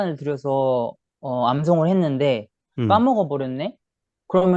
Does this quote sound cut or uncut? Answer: uncut